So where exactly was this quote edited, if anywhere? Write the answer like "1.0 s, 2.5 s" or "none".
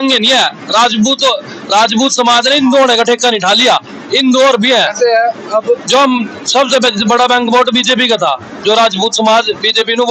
none